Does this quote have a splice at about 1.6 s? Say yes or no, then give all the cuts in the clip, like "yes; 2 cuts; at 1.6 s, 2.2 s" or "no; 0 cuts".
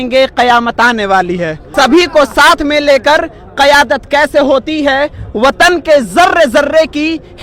yes; 1 cut; at 1.6 s